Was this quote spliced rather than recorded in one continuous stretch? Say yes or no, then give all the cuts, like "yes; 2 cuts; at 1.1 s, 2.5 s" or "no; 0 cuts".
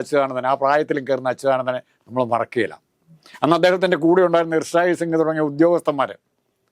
no; 0 cuts